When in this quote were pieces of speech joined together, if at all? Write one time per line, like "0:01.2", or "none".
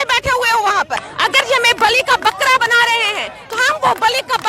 0:01.1